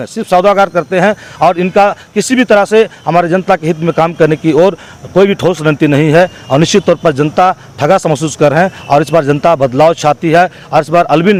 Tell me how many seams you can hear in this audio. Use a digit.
0